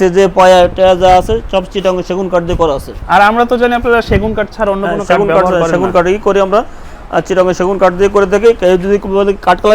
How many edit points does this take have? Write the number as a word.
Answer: zero